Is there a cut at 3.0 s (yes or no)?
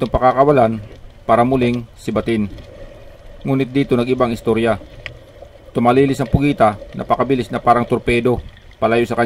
no